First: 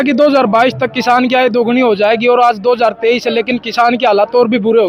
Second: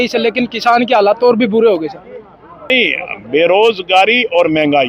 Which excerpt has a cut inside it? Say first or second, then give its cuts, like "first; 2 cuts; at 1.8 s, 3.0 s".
second; 1 cut; at 2.7 s